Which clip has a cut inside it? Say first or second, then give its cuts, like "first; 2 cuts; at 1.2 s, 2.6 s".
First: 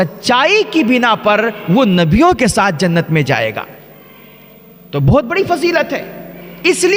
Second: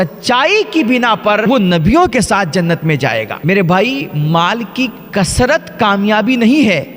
second; 2 cuts; at 1.4 s, 3.3 s